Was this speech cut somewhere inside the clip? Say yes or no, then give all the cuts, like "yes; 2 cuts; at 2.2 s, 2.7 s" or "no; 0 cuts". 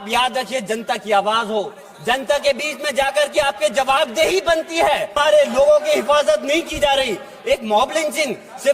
yes; 1 cut; at 5.1 s